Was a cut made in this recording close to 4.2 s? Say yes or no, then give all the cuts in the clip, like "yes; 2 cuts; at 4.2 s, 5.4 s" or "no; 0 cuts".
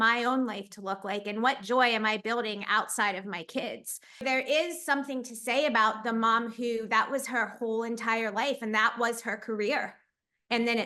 yes; 1 cut; at 4.2 s